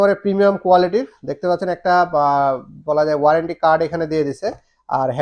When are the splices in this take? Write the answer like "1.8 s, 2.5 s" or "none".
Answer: none